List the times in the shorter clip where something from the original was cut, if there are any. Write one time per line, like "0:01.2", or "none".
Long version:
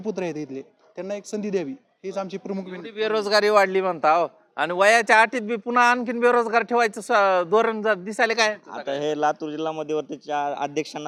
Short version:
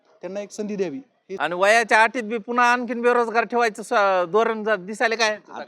0:01.2